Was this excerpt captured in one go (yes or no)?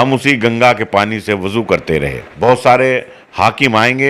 no